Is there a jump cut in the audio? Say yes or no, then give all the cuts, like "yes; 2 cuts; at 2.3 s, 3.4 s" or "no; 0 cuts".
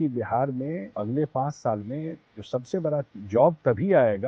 yes; 1 cut; at 1.0 s